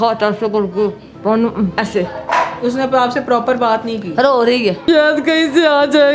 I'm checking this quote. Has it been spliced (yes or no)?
yes